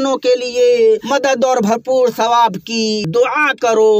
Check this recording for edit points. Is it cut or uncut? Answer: cut